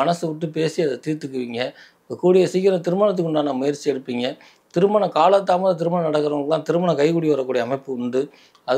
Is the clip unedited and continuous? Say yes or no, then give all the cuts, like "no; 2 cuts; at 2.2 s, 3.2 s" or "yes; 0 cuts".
yes; 0 cuts